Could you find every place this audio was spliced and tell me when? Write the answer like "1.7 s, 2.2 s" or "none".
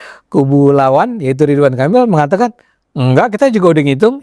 3.3 s